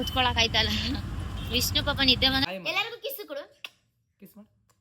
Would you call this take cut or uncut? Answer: cut